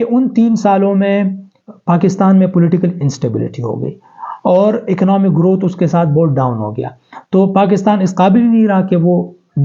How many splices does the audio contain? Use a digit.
0